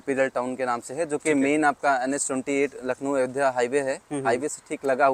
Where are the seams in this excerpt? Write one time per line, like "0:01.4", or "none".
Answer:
none